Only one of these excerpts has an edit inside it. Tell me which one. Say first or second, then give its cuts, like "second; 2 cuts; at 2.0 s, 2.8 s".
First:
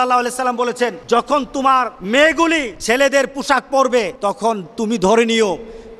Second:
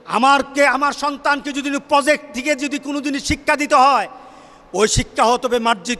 first; 4 cuts; at 1.0 s, 2.0 s, 2.7 s, 4.1 s